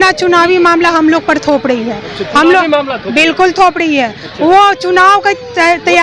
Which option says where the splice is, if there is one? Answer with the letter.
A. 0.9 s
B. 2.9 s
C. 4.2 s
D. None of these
D